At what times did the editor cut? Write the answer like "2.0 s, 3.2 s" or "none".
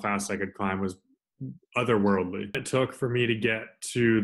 2.6 s